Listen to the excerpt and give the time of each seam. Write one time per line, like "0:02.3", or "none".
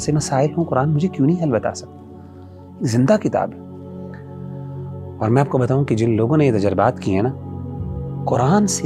none